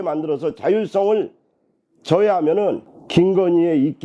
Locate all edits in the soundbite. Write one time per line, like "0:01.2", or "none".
0:02.9

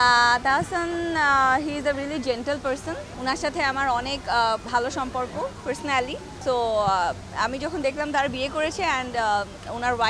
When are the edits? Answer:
0:03.1
0:04.6
0:06.3

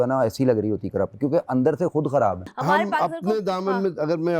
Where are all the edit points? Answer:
0:02.5

